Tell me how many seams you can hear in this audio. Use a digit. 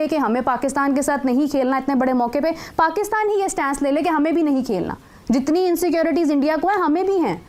0